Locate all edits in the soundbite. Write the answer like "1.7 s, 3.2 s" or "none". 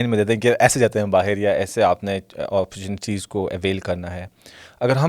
none